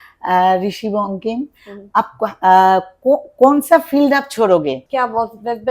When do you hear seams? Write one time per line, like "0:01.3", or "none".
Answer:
0:04.8